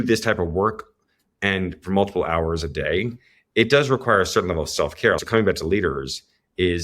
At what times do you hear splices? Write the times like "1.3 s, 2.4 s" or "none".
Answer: 5.2 s